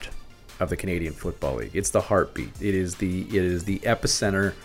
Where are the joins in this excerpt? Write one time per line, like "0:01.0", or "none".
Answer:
0:02.5